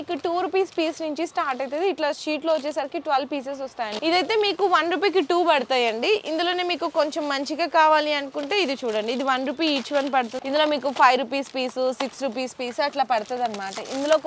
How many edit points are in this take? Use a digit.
2